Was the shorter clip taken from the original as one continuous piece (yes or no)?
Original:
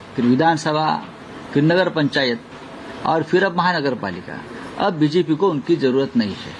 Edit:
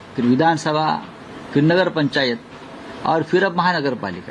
yes